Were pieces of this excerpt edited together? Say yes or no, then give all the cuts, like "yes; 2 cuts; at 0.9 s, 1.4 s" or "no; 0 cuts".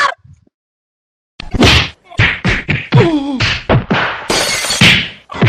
no; 0 cuts